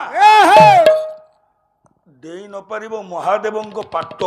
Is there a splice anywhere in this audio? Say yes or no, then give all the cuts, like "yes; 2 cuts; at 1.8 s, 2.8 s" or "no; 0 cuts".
no; 0 cuts